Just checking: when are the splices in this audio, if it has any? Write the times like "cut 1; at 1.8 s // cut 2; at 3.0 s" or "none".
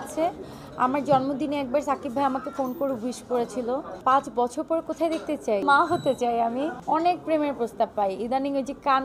cut 1; at 3.9 s // cut 2; at 5.6 s // cut 3; at 6.8 s